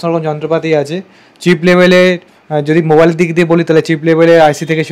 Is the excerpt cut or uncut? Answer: uncut